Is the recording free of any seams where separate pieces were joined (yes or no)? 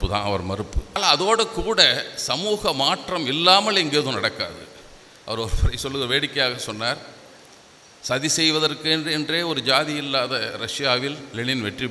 no